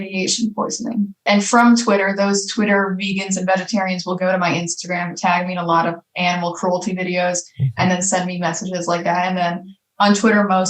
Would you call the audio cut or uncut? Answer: cut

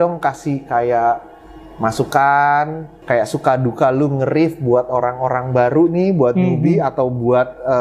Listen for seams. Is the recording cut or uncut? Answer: uncut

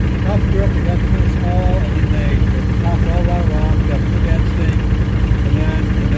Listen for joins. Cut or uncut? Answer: uncut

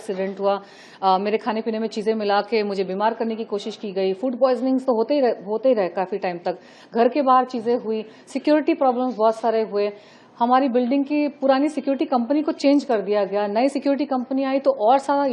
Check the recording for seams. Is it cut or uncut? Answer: uncut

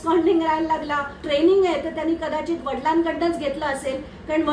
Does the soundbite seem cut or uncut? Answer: cut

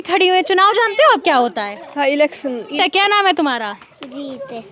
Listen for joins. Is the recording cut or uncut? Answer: cut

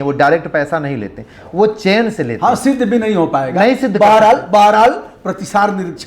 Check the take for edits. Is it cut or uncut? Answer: uncut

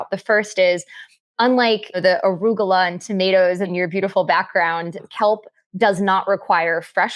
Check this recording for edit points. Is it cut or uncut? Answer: cut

